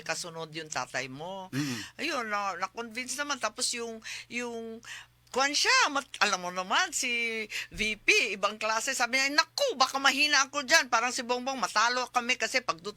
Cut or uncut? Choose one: uncut